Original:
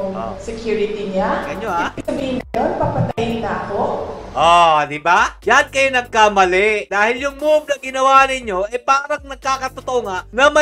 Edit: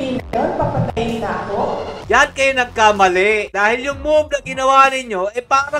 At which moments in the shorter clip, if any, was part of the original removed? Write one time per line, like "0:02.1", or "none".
0:02.0

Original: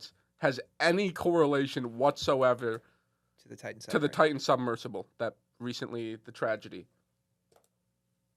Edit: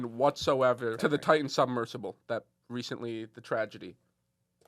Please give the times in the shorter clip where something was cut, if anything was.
0:01.0

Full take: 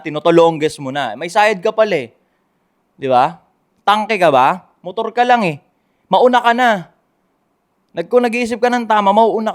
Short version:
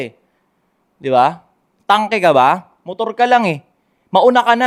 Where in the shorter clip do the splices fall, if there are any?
none

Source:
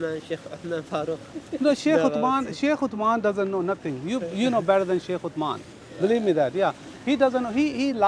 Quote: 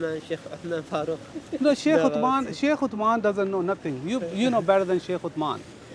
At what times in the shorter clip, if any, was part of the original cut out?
none

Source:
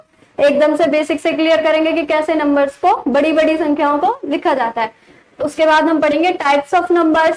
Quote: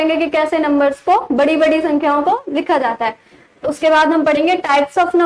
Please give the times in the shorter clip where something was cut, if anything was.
none

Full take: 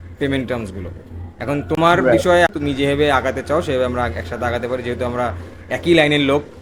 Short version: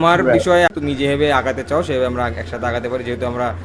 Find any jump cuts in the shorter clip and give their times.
none

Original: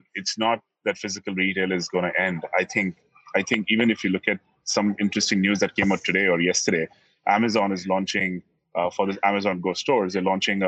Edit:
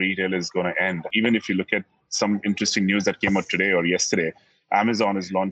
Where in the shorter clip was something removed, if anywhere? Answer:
0:01.1

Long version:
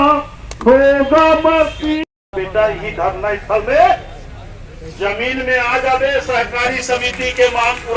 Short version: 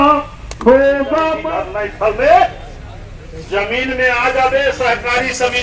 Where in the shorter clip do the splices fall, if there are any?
0:01.4

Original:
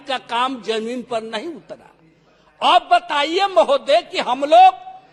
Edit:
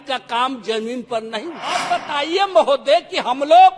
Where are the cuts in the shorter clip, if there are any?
0:01.8

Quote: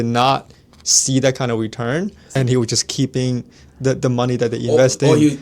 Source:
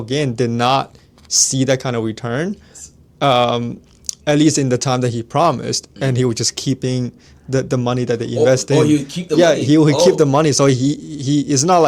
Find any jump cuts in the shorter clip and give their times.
0:02.2

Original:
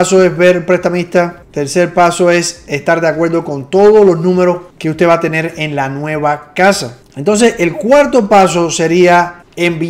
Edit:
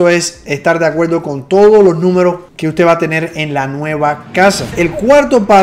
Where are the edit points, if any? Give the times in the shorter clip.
0:04.7

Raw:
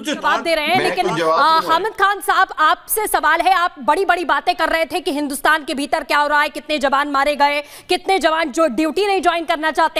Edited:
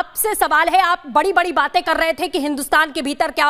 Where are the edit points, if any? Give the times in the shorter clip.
none

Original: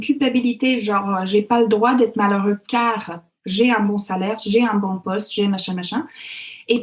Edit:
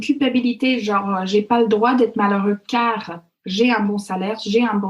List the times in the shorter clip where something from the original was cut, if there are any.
none

